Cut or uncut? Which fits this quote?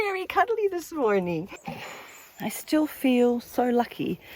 cut